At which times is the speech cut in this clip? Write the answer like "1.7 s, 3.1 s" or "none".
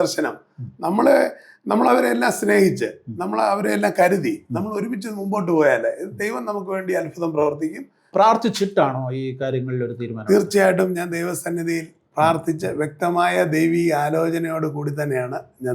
8.1 s